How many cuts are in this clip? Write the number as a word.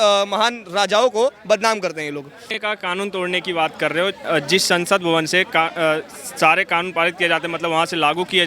one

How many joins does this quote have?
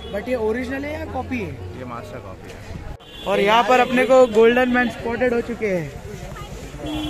one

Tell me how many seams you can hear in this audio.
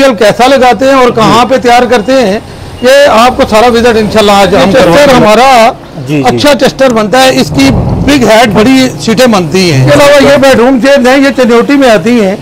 two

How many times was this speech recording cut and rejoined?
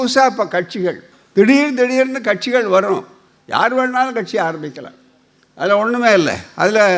one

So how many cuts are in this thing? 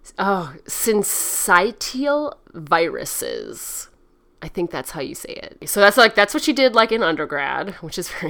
one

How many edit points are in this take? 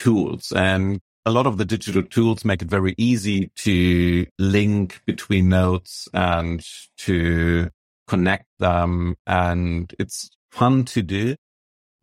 one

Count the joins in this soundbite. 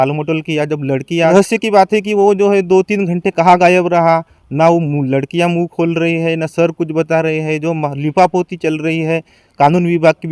one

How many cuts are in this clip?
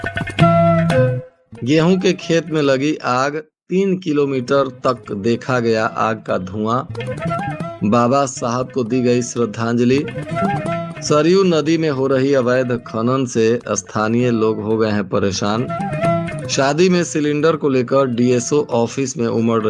one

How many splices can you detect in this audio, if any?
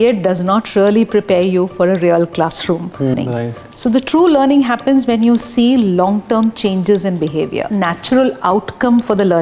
two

